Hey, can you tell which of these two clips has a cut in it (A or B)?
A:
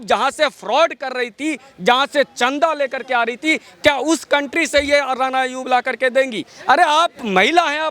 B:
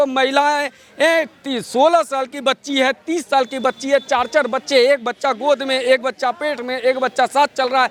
A